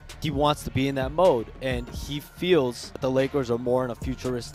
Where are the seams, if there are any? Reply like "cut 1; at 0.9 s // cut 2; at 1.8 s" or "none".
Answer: none